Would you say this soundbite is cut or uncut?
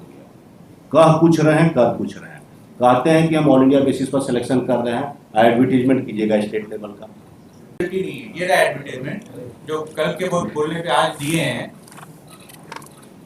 cut